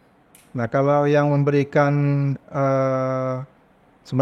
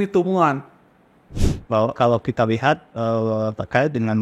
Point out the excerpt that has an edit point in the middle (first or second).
second